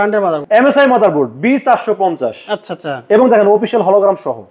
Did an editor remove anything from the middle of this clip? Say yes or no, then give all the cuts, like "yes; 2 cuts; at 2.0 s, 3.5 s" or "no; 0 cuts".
no; 0 cuts